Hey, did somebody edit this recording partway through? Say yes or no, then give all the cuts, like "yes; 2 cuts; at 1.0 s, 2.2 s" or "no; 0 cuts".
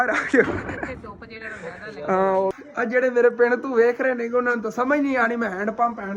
yes; 1 cut; at 2.5 s